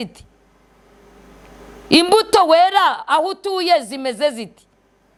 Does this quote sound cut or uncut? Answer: uncut